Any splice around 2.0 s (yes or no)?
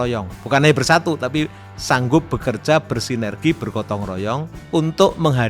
no